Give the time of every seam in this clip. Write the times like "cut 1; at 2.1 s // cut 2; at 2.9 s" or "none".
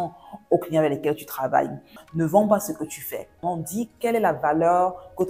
cut 1; at 2.0 s // cut 2; at 3.4 s